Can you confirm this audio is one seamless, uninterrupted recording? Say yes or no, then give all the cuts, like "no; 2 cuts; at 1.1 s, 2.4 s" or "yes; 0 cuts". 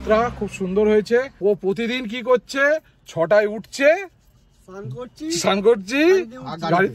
no; 1 cut; at 1.4 s